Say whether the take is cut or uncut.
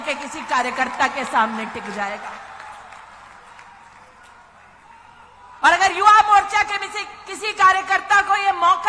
uncut